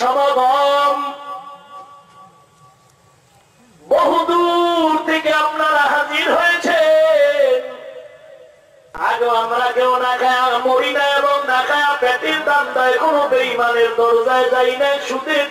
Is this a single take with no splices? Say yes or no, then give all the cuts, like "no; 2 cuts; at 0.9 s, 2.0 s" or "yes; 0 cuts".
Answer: no; 1 cut; at 8.9 s